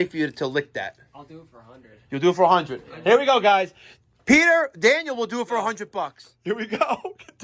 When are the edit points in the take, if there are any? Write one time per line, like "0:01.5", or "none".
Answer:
0:05.8